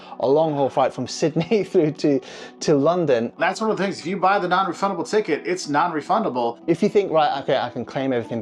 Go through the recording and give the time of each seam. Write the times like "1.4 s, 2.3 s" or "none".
3.4 s, 6.6 s